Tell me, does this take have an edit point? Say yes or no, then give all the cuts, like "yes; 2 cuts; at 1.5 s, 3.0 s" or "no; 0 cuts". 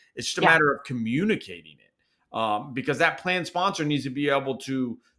no; 0 cuts